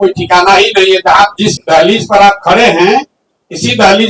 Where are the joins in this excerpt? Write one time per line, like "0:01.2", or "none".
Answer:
0:01.6

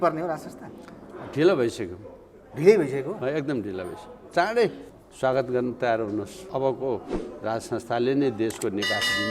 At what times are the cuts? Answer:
0:04.8
0:06.4

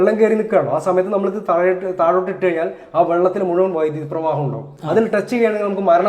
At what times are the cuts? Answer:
0:04.7

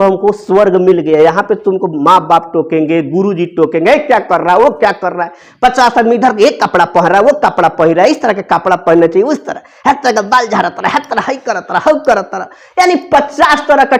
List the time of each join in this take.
none

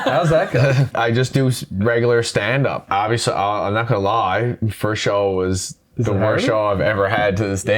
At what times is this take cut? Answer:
0:00.9
0:02.8
0:04.7

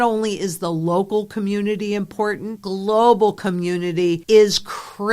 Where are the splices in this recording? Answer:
0:02.5
0:04.2

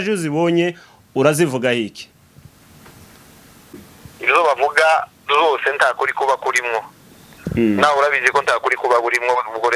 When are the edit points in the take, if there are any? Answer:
none

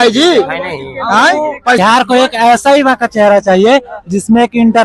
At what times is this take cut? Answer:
0:01.8

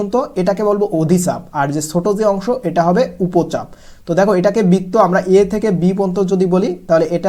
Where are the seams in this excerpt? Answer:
none

